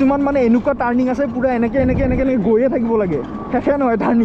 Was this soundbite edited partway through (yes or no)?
no